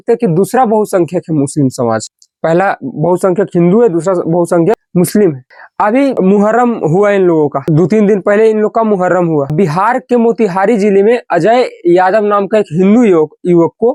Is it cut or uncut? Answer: uncut